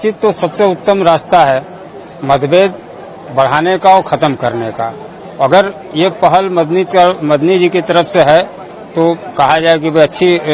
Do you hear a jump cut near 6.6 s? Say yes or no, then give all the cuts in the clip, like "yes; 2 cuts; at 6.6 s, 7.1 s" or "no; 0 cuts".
no; 0 cuts